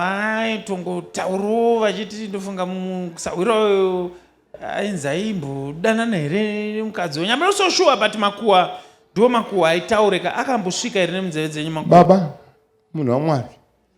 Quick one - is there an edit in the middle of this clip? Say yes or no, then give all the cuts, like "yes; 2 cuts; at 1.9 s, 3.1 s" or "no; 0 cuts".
yes; 1 cut; at 11.8 s